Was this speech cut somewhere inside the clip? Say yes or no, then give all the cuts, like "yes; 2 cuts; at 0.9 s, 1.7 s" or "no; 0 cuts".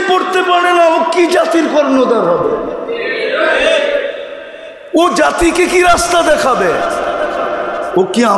no; 0 cuts